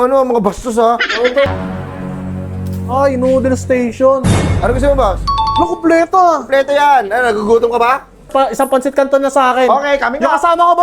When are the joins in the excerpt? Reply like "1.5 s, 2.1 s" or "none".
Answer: 1.5 s, 8.2 s